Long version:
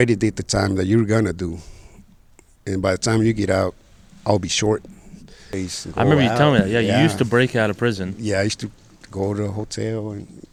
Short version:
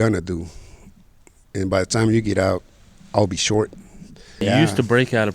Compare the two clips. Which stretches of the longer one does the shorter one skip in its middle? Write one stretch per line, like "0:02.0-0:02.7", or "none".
0:05.5-0:06.8